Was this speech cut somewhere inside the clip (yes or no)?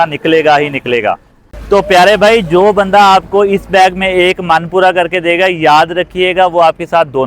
yes